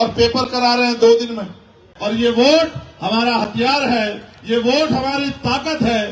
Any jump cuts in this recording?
yes; 1 cut; at 1.8 s

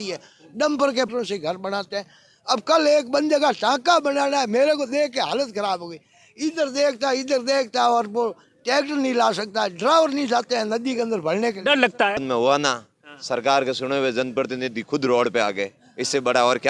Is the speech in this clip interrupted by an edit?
yes; 2 cuts; at 1.1 s, 12.2 s

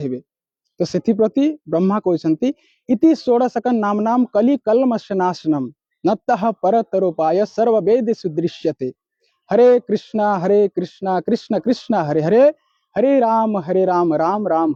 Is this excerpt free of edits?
yes; 0 cuts

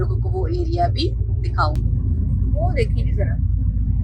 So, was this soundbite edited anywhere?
yes; 1 cut; at 1.8 s

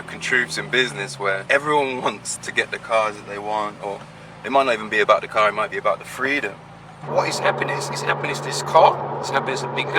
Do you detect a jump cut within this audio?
yes; 3 cuts; at 1.4 s, 2.4 s, 7.0 s

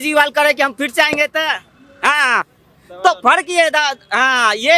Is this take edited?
no; 0 cuts

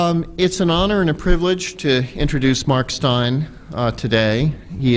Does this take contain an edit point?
yes; 1 cut; at 2.9 s

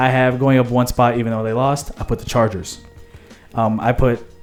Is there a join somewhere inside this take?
no; 0 cuts

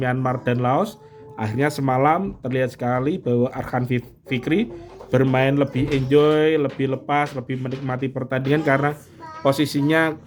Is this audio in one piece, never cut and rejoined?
yes; 0 cuts

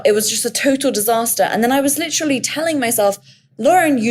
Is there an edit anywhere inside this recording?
no; 0 cuts

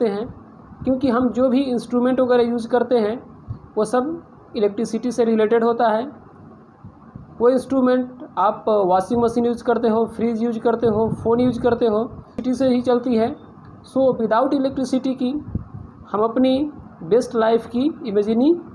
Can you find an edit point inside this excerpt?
yes; 1 cut; at 12.4 s

